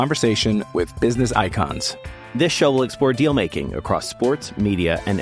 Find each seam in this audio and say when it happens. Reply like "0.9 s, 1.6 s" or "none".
none